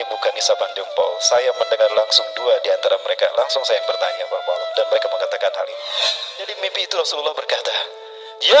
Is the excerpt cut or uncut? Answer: cut